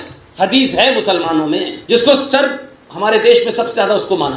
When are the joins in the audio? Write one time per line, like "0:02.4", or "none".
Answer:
0:01.8